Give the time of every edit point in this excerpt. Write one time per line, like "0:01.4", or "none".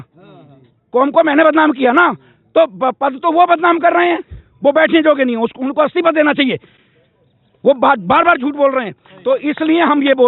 none

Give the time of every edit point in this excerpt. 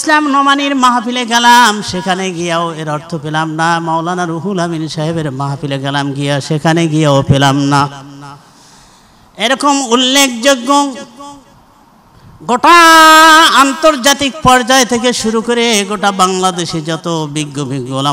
none

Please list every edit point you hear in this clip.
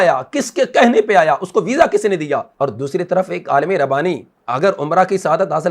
none

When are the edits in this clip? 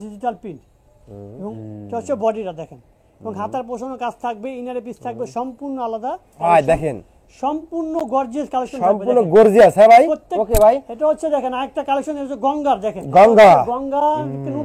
0:01.5
0:06.4
0:10.3

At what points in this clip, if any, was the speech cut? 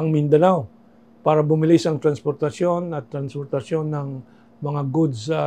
none

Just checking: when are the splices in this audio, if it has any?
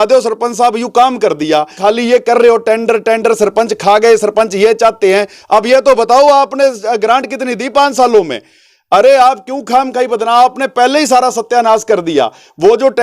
0:01.7

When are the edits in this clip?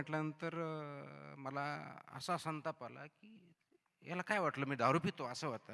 none

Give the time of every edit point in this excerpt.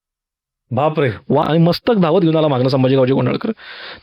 0:01.4

